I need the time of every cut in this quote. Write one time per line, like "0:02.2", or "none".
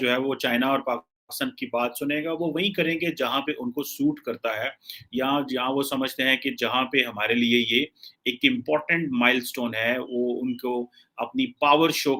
none